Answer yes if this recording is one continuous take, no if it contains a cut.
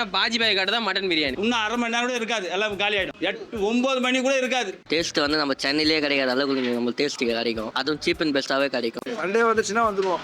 no